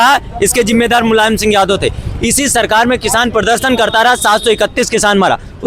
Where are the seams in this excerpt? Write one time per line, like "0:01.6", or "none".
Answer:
none